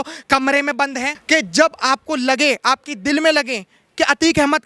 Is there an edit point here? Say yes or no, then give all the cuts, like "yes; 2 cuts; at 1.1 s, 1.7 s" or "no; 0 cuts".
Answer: yes; 1 cut; at 1.1 s